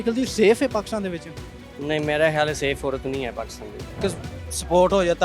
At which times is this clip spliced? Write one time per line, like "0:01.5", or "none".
0:04.0